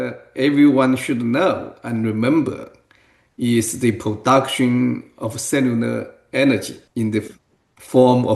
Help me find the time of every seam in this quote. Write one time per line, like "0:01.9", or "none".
0:06.8